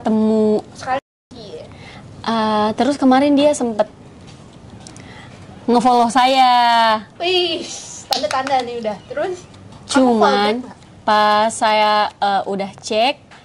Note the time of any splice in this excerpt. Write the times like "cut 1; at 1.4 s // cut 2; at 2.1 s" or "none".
cut 1; at 1.0 s